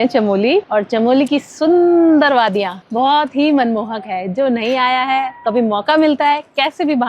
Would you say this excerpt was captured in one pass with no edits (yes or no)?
yes